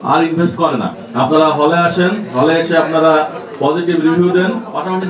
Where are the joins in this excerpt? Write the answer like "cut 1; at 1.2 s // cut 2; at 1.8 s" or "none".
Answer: cut 1; at 1.0 s